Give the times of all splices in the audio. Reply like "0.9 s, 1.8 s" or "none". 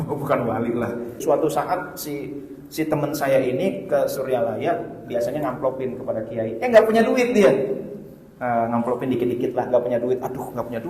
1.2 s